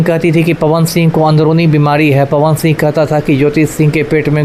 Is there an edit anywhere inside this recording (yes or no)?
no